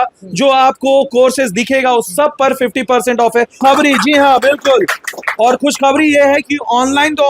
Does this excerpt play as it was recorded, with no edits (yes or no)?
no